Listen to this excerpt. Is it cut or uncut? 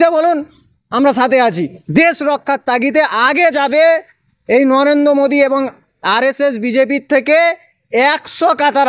cut